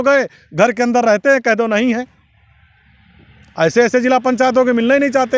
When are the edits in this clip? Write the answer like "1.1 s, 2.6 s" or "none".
none